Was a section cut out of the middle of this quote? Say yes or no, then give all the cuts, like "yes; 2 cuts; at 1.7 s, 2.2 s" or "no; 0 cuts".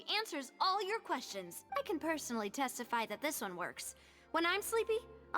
yes; 1 cut; at 1.5 s